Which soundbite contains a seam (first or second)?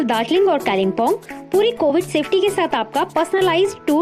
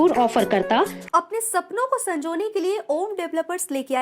second